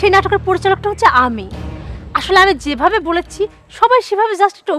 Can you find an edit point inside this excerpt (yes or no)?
no